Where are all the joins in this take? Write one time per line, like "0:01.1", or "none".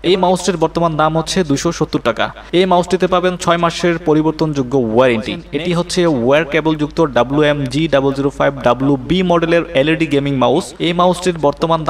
0:05.4
0:10.7